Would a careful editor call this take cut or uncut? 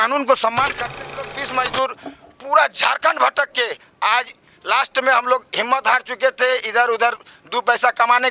cut